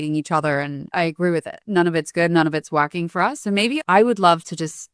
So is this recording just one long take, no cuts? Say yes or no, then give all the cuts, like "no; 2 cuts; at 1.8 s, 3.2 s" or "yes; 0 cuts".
yes; 0 cuts